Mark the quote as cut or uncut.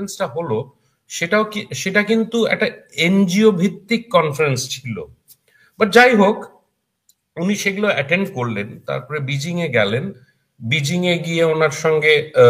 uncut